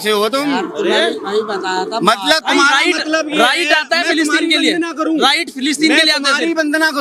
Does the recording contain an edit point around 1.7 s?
no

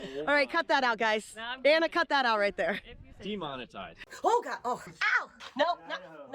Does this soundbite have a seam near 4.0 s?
yes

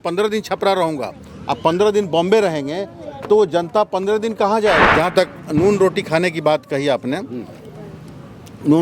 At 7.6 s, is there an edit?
no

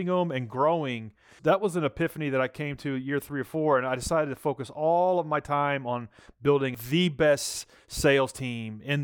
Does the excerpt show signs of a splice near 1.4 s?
yes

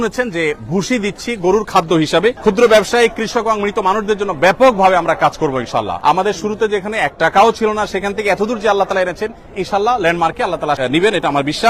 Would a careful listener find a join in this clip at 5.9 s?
yes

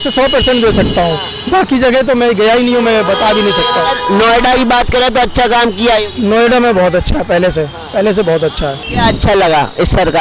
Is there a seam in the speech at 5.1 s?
no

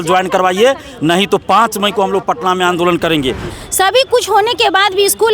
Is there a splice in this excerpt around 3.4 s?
yes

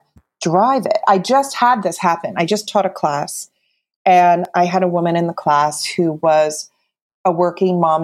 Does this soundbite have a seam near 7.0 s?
yes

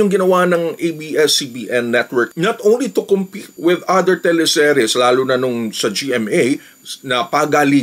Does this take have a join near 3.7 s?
no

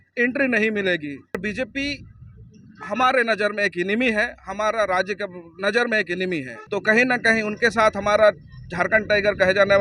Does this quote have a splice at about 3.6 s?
no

